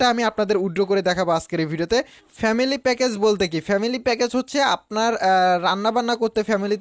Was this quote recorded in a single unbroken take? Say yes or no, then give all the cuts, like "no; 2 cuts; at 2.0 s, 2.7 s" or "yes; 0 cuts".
no; 1 cut; at 2.2 s